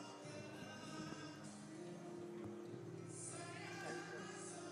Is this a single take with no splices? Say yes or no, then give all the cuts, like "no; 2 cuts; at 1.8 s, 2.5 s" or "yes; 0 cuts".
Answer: yes; 0 cuts